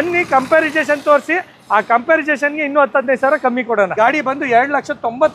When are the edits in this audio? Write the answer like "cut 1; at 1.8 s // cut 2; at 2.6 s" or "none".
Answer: cut 1; at 3.9 s